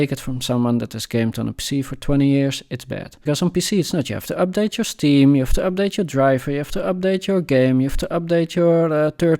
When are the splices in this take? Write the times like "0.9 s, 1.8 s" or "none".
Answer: 3.3 s